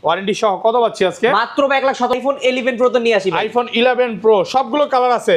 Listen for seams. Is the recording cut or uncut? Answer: cut